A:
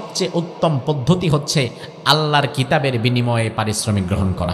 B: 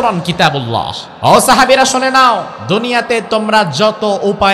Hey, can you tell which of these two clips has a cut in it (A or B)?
B